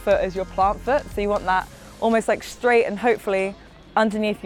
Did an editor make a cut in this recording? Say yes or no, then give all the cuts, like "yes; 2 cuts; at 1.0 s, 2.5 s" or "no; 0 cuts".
no; 0 cuts